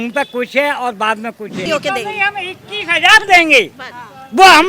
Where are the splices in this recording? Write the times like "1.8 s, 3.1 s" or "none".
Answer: 1.6 s